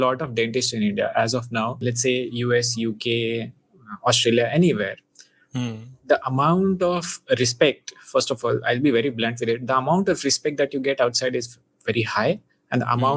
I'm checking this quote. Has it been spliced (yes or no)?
yes